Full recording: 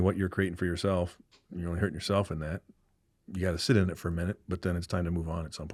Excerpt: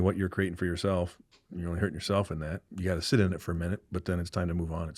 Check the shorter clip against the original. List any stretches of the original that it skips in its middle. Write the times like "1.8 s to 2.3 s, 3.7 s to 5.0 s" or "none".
2.6 s to 3.2 s